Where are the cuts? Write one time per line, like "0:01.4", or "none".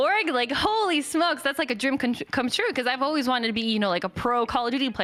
none